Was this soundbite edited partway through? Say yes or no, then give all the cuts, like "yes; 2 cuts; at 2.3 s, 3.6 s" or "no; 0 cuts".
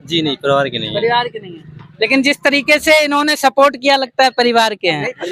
no; 0 cuts